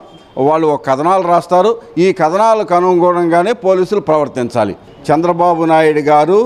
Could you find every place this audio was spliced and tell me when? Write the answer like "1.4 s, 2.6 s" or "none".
4.9 s